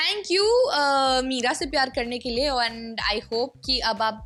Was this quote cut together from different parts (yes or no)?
no